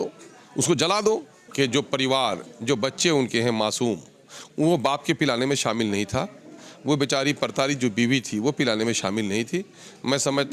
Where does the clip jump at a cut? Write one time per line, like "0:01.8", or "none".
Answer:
0:01.4